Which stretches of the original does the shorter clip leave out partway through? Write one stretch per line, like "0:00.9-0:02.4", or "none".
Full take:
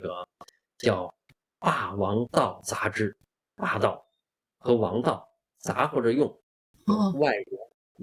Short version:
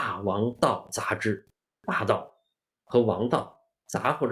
none